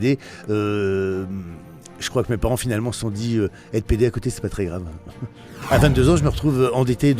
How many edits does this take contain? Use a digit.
1